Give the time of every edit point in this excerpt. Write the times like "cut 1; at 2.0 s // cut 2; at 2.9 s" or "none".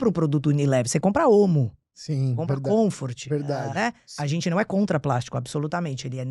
cut 1; at 4.0 s